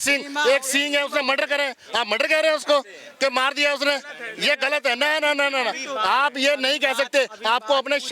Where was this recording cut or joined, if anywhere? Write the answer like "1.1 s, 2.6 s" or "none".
none